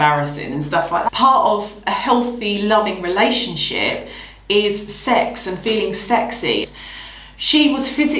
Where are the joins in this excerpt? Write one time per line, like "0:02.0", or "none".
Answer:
0:01.1
0:06.7